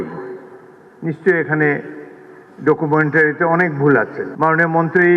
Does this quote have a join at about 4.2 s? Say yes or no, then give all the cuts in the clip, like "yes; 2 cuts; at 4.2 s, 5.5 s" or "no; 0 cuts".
yes; 1 cut; at 4.2 s